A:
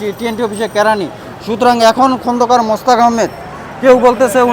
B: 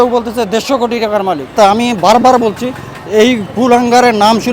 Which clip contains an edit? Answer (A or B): B